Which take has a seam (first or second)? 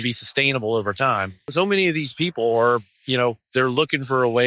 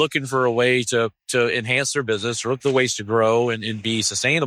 first